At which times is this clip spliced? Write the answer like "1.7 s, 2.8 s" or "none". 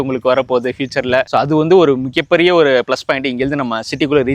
none